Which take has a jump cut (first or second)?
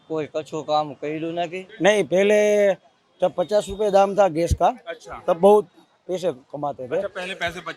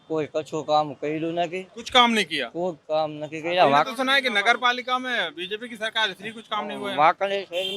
first